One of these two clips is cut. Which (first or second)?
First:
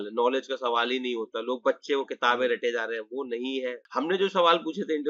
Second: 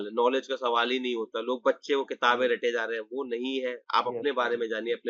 first